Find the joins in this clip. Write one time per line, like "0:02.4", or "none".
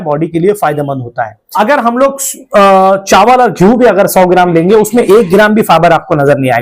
0:01.5